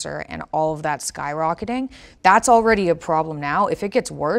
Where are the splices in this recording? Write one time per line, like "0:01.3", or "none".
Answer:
0:02.0